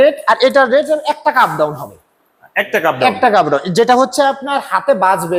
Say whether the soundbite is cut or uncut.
uncut